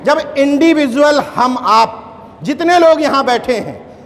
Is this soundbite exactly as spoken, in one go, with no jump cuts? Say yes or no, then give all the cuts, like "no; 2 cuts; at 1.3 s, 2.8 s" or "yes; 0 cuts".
yes; 0 cuts